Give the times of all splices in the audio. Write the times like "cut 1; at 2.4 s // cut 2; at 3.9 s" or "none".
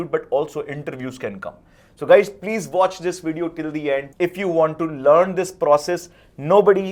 none